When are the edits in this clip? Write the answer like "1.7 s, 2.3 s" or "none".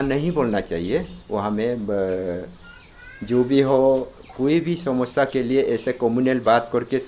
none